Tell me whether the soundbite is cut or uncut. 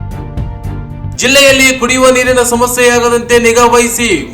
cut